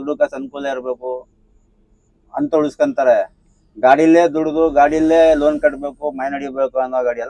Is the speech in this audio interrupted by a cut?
no; 0 cuts

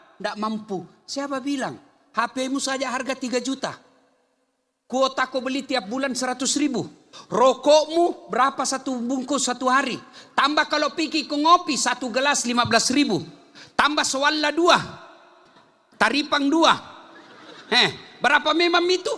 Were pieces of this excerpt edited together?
no; 0 cuts

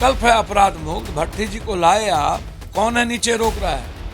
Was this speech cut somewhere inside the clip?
yes; 1 cut; at 2.5 s

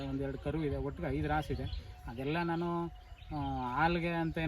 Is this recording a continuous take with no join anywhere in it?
yes; 0 cuts

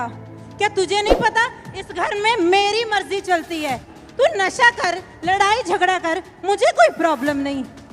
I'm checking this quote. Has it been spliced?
yes; 1 cut; at 4.0 s

